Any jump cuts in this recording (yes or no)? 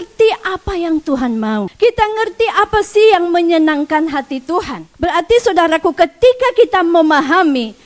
yes